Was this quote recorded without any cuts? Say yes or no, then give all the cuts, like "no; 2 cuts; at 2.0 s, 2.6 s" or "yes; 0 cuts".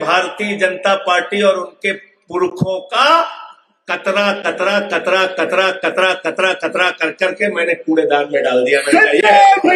yes; 0 cuts